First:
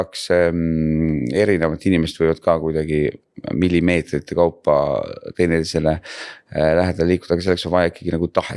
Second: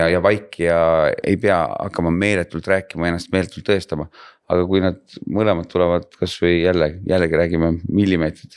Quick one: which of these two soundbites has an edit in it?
second; 1 cut; at 1.2 s

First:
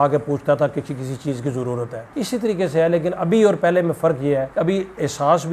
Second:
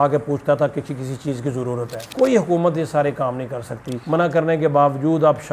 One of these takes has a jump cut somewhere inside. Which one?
second; 2 cuts; at 2.1 s, 3.9 s

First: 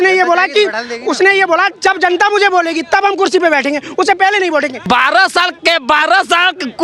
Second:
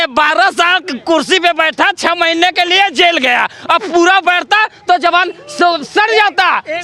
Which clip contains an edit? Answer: first; 1 cut; at 4.8 s

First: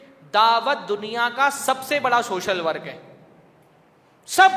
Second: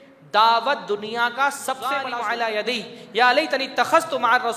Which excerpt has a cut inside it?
second; 1 cut; at 2.1 s

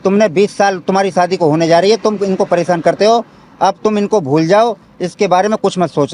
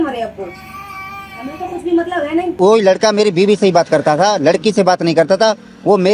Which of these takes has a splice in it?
second; 1 cut; at 2.5 s

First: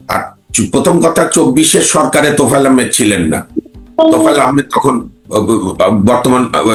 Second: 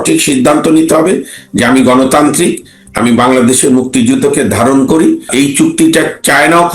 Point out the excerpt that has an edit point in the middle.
second; 1 cut; at 5.3 s

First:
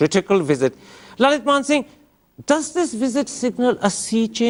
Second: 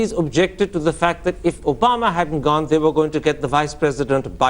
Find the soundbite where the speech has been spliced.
second; 1 cut; at 3.3 s

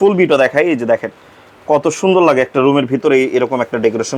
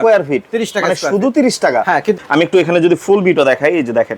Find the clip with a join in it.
second; 1 cut; at 2.2 s

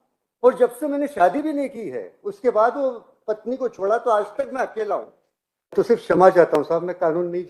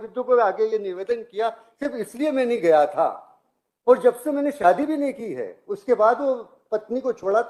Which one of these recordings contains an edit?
first; 1 cut; at 5.7 s

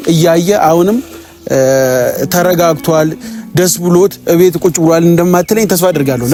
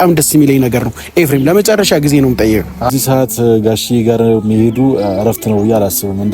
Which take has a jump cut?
second; 1 cut; at 2.9 s

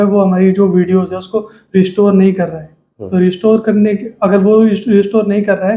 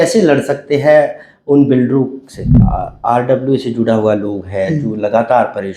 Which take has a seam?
second; 1 cut; at 2.6 s

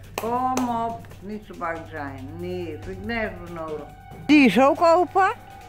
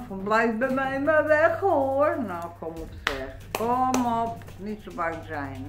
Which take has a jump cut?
first; 1 cut; at 4.3 s

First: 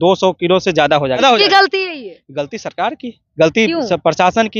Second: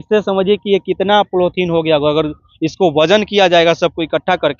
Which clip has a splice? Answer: first; 1 cut; at 1.2 s

